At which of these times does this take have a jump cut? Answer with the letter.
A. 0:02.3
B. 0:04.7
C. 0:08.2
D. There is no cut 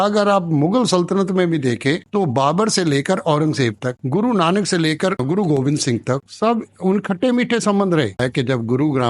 C